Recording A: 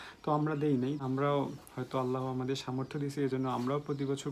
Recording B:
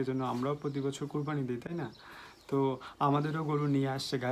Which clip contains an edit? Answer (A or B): A